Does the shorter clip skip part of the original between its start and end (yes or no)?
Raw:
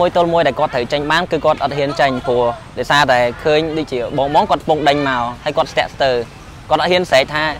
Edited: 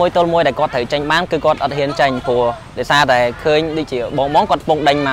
no